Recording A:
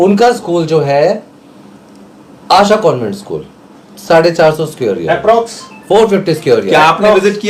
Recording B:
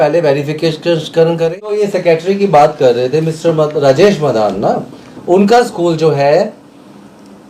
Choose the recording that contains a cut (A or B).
B